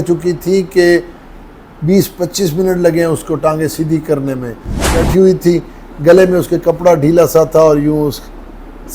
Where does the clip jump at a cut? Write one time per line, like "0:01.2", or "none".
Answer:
0:05.0